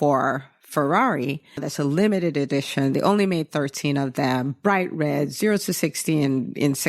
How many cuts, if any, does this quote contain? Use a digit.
1